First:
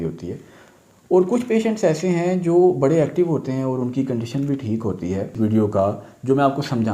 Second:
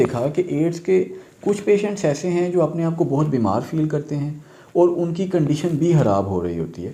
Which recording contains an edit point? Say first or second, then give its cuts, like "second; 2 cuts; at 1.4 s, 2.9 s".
first; 1 cut; at 5.3 s